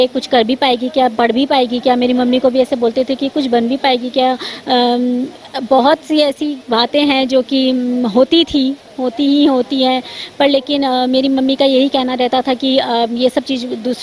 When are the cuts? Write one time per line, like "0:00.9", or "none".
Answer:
none